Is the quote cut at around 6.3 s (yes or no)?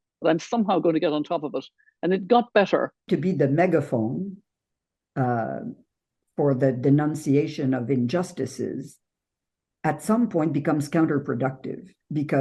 no